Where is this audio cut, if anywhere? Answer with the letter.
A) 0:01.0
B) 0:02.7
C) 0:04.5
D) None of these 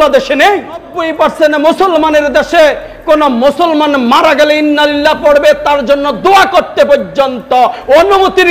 A